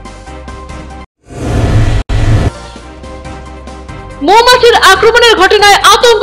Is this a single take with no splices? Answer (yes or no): no